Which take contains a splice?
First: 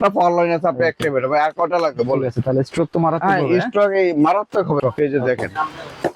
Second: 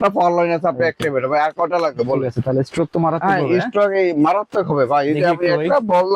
first; 1 cut; at 4.8 s

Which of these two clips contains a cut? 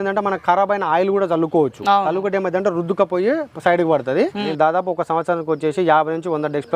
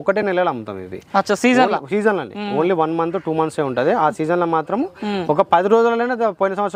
first; 1 cut; at 4.4 s

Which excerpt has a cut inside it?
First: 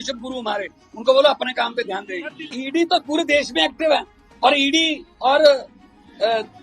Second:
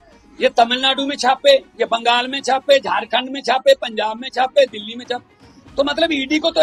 first; 1 cut; at 2.5 s

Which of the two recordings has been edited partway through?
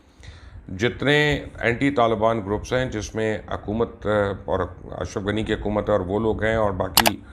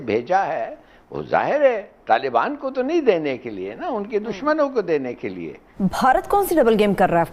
second; 1 cut; at 5.6 s

